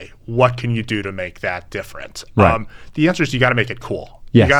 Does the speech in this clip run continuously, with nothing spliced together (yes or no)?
yes